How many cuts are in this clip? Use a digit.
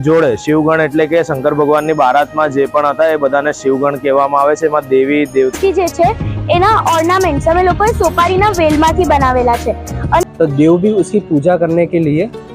2